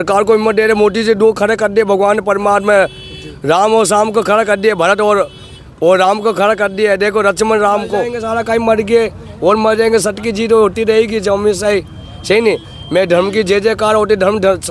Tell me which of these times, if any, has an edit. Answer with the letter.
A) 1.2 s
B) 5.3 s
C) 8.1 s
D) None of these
C